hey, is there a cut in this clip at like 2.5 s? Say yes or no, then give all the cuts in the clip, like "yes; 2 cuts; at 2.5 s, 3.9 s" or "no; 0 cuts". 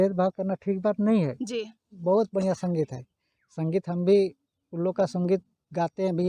no; 0 cuts